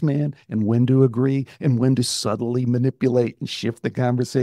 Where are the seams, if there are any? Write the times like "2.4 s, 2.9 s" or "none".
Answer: none

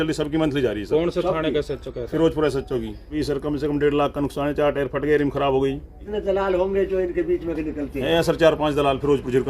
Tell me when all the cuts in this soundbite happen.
3.1 s, 6.1 s

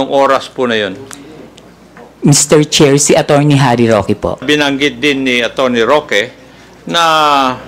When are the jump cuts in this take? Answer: 4.4 s

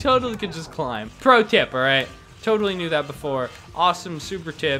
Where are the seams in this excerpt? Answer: 1.1 s

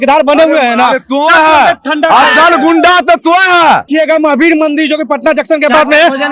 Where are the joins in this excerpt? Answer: 3.9 s

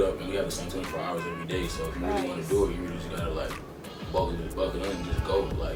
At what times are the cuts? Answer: none

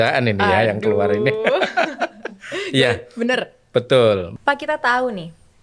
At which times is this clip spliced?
4.3 s

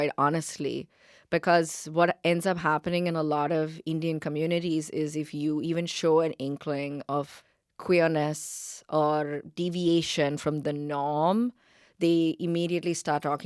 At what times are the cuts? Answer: none

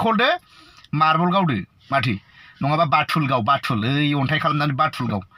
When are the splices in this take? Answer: none

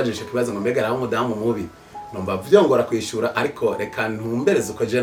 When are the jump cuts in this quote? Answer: none

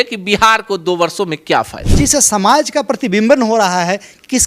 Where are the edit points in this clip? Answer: 1.8 s

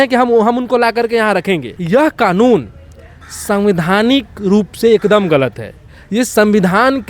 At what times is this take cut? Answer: 1.7 s

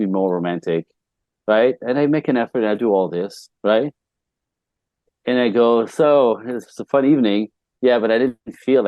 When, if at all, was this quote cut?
none

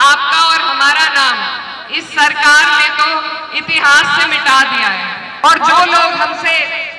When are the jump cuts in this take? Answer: 5.3 s

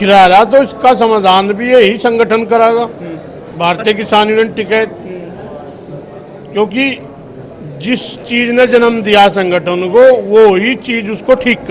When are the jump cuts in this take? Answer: none

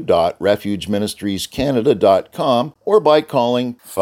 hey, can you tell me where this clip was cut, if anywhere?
2.7 s

